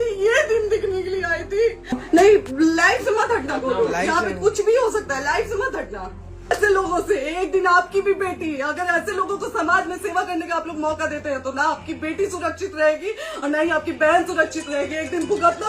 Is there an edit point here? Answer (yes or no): yes